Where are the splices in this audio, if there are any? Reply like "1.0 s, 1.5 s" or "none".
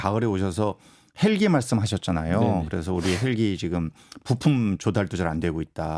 none